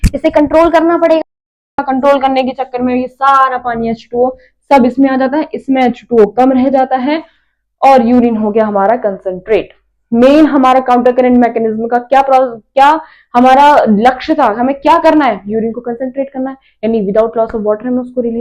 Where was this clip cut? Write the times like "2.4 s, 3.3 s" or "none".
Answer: none